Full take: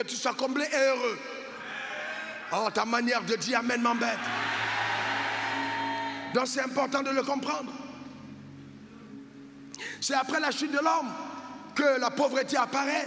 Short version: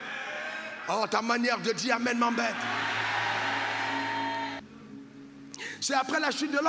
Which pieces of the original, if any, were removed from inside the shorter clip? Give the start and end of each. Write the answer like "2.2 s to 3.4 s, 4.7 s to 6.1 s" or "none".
6.2 s to 8.8 s